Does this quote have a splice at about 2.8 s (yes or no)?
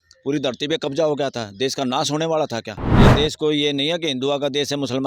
yes